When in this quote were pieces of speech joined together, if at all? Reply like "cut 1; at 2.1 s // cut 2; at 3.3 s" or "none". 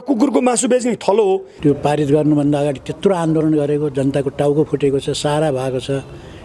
cut 1; at 1.5 s